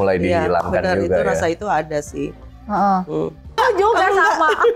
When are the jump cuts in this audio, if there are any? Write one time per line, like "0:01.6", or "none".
0:03.5